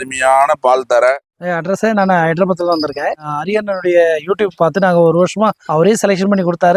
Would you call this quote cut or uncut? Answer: cut